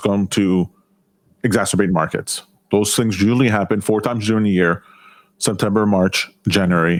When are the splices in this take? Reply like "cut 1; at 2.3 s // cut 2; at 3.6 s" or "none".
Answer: none